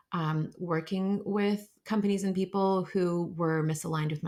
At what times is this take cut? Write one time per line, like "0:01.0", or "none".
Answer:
none